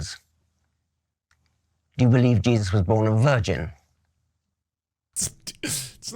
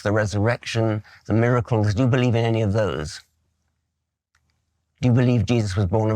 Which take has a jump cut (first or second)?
first